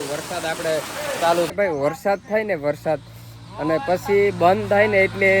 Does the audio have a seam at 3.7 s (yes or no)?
no